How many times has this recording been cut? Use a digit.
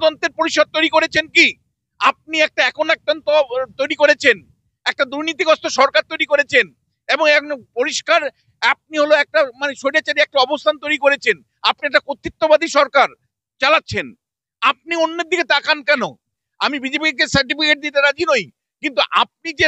1